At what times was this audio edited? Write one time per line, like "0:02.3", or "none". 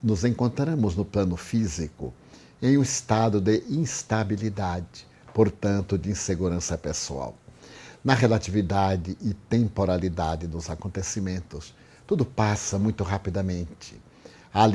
0:07.0